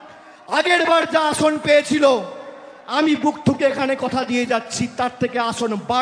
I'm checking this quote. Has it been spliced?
no; 0 cuts

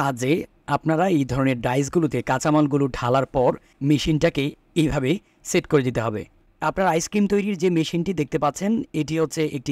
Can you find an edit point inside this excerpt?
no; 0 cuts

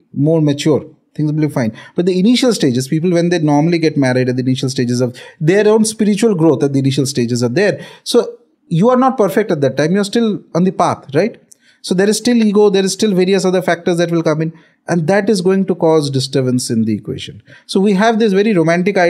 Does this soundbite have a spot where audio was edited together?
no; 0 cuts

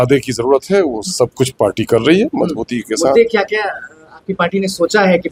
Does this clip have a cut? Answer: no; 0 cuts

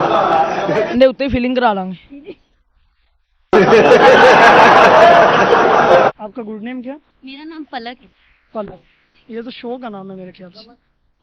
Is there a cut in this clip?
yes; 1 cut; at 0.9 s

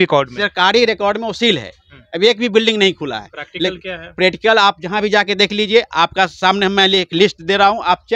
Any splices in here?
no; 0 cuts

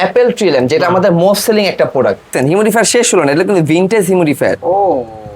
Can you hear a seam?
yes; 1 cut; at 2.3 s

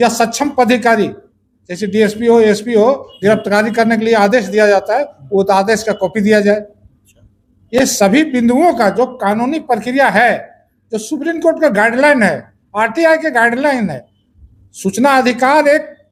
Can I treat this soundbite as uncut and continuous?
yes; 0 cuts

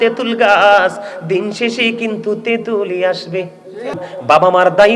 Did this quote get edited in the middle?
yes; 1 cut; at 3.9 s

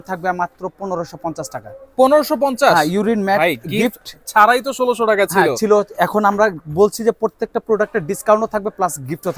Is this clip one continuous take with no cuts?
yes; 0 cuts

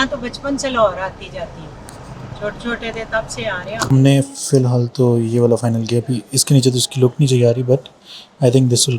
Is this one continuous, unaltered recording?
no; 1 cut; at 3.9 s

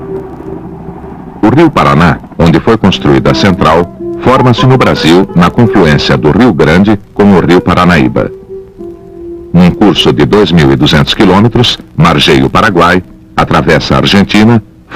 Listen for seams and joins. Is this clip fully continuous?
no; 1 cut; at 10.0 s

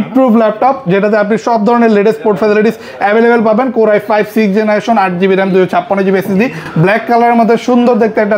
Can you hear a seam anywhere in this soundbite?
no; 0 cuts

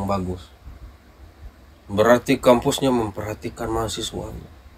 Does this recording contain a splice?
no; 0 cuts

